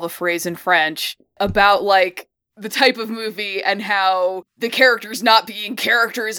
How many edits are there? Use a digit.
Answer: 2